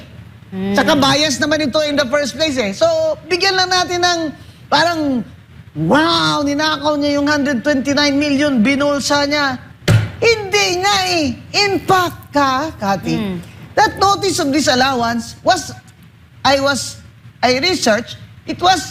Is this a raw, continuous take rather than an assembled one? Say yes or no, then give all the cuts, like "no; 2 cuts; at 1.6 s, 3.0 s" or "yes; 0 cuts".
yes; 0 cuts